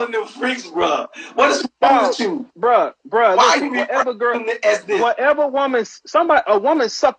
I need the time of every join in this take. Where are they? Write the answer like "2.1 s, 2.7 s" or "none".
none